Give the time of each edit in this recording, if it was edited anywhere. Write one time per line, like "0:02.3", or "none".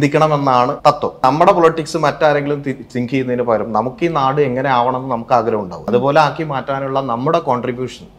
0:01.2
0:05.8